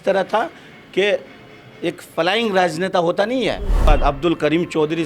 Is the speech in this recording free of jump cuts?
no; 1 cut; at 3.8 s

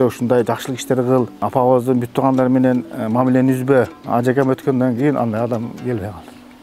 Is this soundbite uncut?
no; 2 cuts; at 1.3 s, 4.0 s

